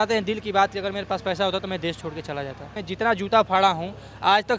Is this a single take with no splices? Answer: no; 1 cut; at 2.8 s

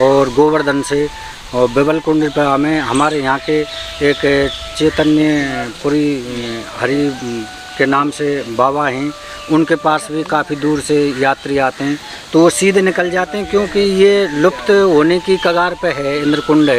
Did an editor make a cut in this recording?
no; 0 cuts

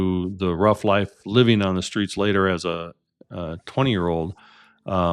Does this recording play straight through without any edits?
yes; 0 cuts

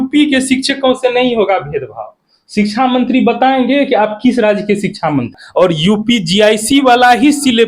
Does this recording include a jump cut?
yes; 1 cut; at 5.4 s

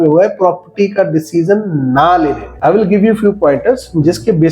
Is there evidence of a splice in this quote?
yes; 1 cut; at 2.5 s

